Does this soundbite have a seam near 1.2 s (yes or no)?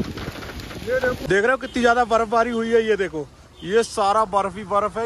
yes